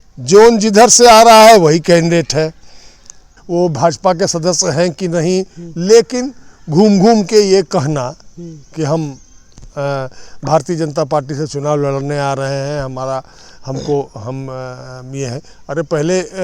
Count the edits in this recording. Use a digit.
1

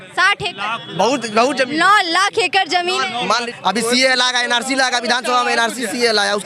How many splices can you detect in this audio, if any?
1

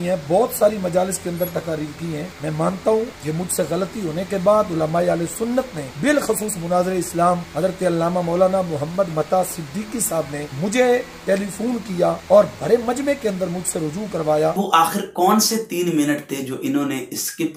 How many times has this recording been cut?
7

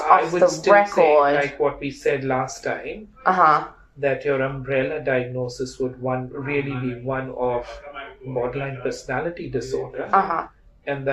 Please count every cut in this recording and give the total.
1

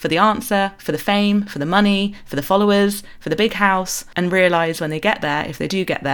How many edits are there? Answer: 1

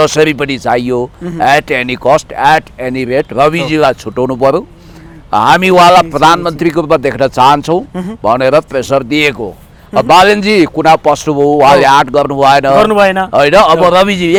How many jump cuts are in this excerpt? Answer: 0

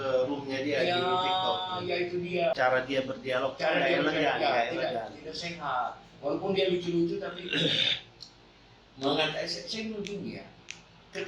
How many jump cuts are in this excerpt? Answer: 1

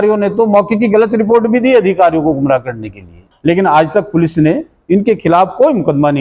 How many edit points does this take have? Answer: 1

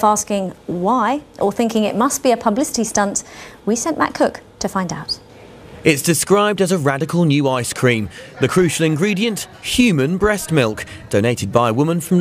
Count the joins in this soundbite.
1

